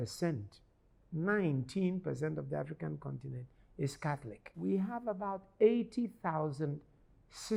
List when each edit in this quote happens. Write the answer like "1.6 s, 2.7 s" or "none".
4.4 s

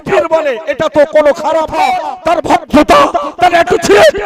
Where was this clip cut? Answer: 2.1 s

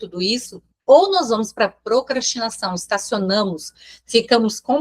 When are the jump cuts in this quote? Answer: none

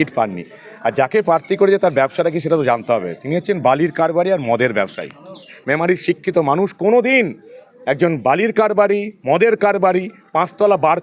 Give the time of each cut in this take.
5.6 s

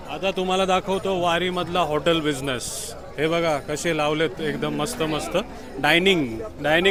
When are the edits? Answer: none

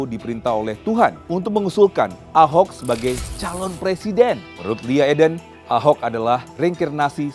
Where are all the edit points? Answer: 1.2 s, 4.5 s, 5.5 s, 6.5 s

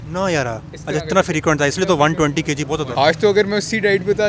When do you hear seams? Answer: 2.9 s

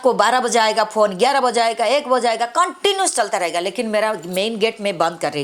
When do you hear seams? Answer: none

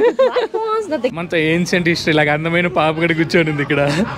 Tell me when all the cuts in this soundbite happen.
1.2 s

